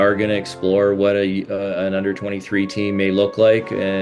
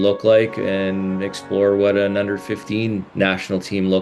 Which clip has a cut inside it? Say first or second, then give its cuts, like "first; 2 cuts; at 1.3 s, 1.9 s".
second; 1 cut; at 3.1 s